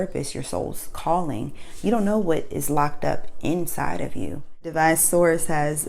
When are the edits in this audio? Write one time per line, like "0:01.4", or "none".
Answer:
0:04.7